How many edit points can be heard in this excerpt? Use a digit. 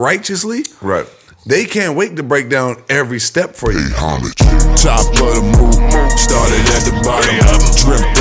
1